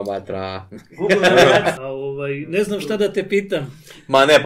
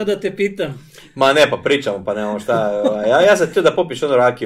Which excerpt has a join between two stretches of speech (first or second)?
first